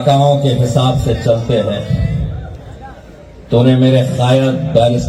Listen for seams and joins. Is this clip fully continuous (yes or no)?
yes